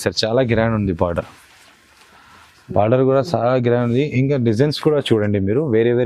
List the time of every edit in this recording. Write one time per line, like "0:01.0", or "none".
none

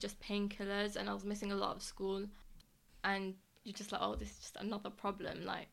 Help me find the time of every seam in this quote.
0:02.5

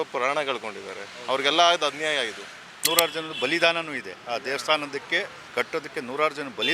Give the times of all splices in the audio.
0:02.8
0:05.4

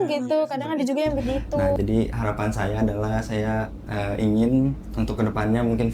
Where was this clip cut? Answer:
0:01.8

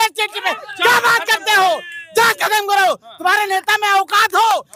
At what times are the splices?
none

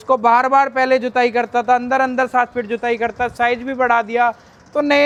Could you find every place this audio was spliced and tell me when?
none

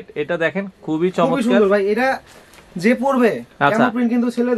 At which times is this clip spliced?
none

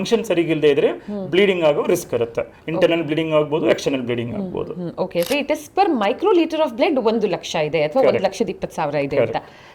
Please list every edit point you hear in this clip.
0:05.3

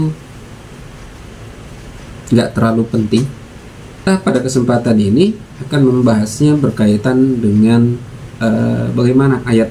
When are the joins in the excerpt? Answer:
0:04.0

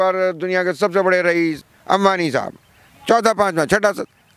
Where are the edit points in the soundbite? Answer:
0:01.6

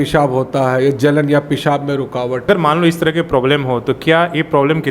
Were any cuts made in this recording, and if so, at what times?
0:02.4

